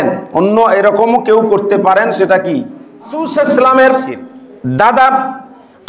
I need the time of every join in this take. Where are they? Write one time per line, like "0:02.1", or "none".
0:03.3

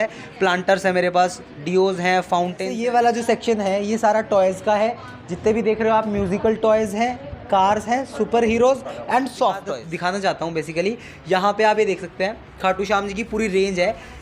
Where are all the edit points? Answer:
0:02.7
0:09.8

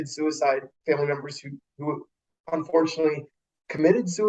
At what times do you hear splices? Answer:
none

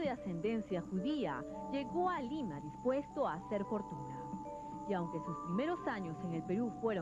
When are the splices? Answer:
none

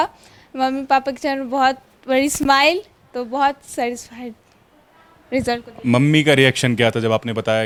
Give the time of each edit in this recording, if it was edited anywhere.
none

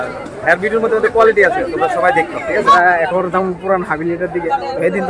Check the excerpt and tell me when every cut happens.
0:02.8

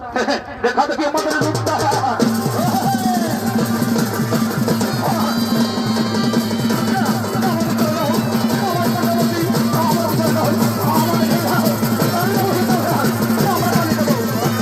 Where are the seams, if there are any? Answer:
none

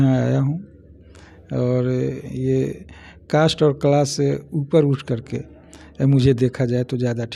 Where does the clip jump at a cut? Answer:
none

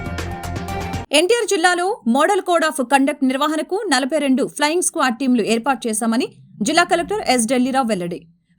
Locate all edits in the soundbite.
0:01.0

